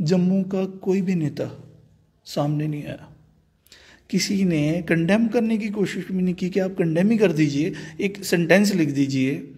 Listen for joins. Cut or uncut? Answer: uncut